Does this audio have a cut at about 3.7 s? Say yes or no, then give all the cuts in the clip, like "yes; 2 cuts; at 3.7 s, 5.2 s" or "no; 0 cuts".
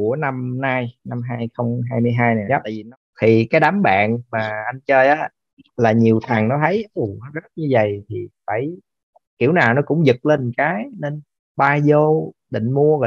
no; 1 cut; at 2.4 s